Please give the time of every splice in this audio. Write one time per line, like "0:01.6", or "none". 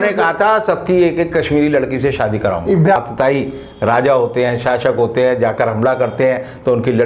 0:03.0